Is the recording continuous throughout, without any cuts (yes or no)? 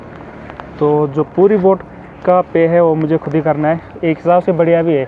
yes